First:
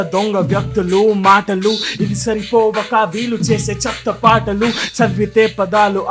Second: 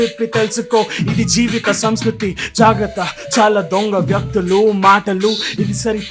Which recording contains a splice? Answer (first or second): first